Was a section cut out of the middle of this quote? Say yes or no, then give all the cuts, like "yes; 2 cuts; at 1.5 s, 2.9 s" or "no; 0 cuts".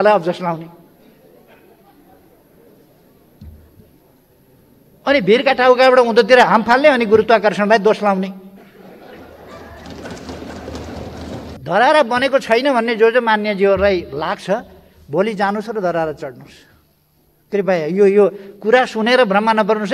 yes; 1 cut; at 11.6 s